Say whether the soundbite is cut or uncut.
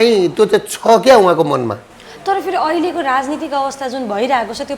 uncut